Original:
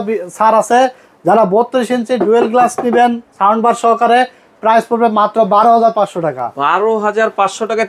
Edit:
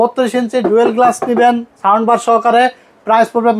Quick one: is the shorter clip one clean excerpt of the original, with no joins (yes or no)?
yes